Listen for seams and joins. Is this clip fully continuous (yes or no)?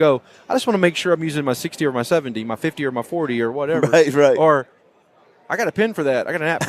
yes